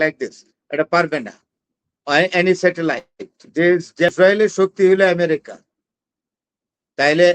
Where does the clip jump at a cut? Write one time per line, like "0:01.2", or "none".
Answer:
0:04.1

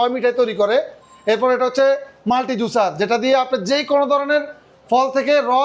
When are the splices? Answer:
none

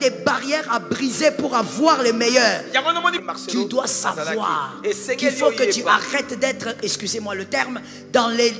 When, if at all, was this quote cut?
0:03.1

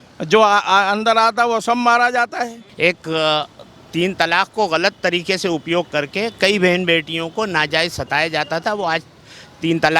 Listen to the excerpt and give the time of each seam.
0:02.6

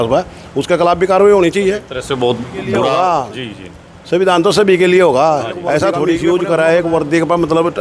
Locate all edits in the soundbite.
0:01.9
0:02.9
0:06.1

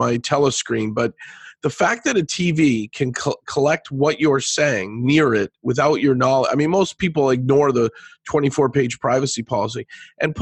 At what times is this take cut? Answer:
none

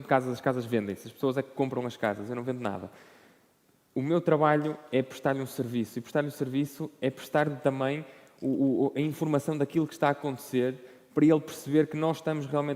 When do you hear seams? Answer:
none

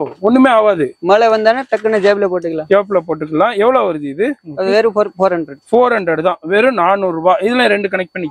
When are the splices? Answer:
none

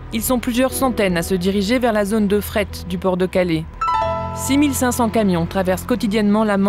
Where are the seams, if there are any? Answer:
0:03.7

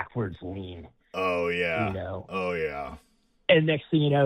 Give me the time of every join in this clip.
none

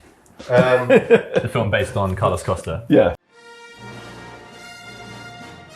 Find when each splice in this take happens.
0:03.1

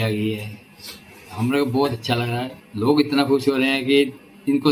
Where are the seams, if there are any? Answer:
0:02.6

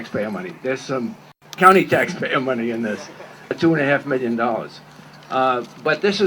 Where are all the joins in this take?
0:03.5

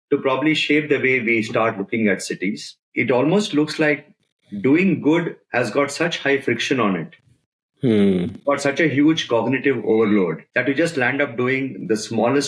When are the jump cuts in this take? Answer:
0:02.8

